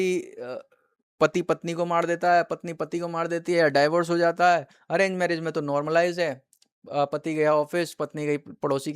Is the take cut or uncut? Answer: uncut